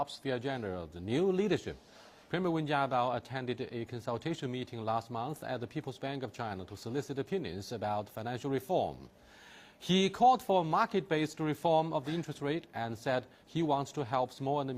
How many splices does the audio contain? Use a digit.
0